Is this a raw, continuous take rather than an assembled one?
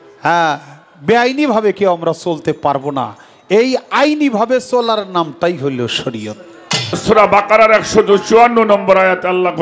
no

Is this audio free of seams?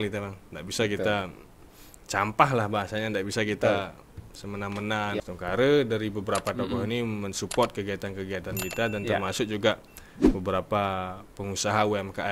no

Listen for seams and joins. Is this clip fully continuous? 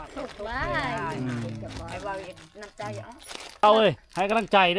no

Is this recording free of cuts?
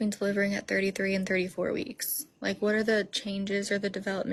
yes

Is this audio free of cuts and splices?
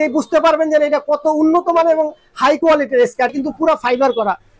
no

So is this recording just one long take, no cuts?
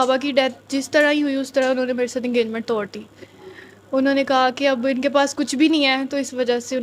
yes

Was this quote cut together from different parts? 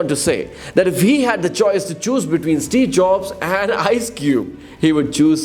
no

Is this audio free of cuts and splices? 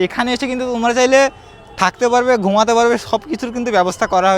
yes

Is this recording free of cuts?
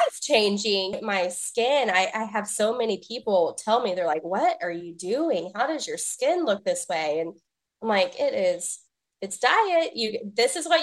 no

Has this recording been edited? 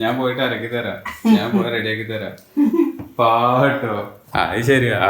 yes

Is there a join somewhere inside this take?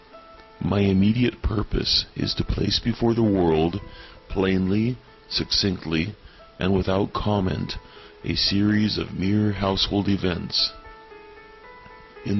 no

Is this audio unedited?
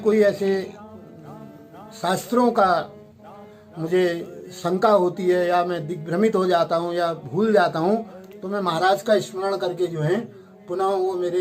yes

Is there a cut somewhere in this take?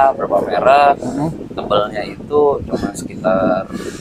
no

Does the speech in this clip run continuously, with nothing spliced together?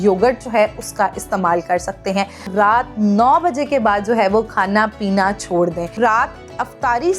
no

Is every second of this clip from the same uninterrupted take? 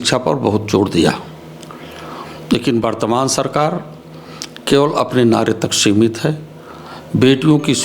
yes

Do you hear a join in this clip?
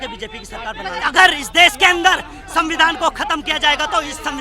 yes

